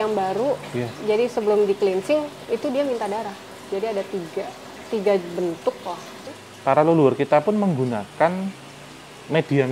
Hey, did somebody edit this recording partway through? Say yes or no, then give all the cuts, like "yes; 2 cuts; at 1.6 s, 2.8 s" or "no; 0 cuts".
yes; 1 cut; at 6.3 s